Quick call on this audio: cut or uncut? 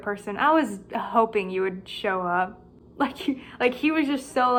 uncut